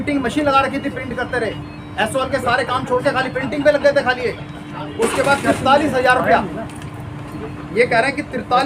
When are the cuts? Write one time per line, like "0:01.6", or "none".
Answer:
none